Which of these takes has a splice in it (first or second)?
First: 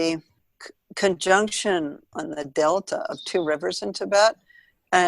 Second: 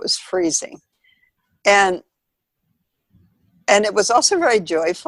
first